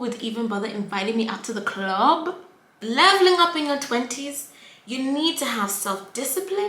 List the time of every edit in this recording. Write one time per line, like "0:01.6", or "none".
0:02.7